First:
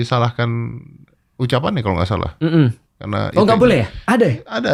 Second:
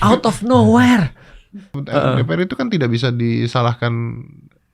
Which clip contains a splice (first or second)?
second